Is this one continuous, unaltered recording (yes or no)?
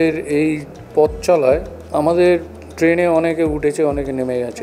no